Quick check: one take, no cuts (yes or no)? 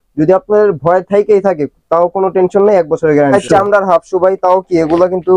no